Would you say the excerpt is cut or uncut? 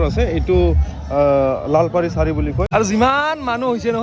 cut